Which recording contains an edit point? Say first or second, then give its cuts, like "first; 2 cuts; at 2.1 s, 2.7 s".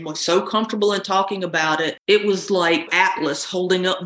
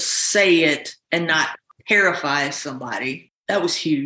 first; 2 cuts; at 2.0 s, 2.9 s